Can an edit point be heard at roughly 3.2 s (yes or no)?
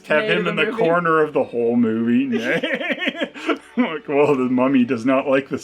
no